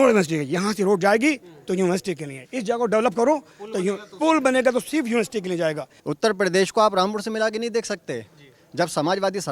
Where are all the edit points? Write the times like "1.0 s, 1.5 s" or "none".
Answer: 5.9 s